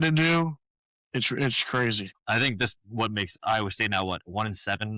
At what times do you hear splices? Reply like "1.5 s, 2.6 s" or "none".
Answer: 2.1 s